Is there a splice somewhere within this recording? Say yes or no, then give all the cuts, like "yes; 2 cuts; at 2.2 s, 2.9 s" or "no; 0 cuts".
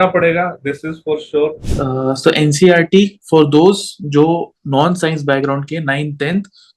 yes; 1 cut; at 1.6 s